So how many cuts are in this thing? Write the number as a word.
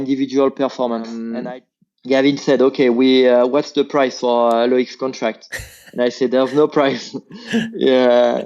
one